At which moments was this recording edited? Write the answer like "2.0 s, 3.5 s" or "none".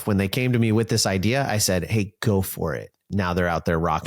2.9 s